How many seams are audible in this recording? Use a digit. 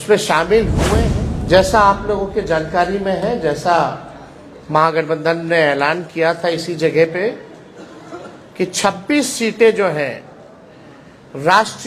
1